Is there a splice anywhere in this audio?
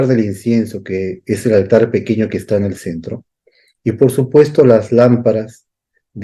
no; 0 cuts

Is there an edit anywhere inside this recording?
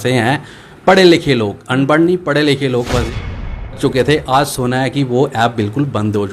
yes; 1 cut; at 3.4 s

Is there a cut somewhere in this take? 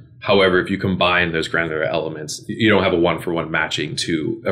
no; 0 cuts

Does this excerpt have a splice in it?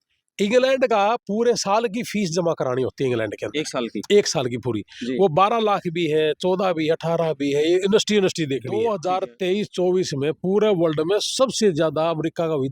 yes; 1 cut; at 8.7 s

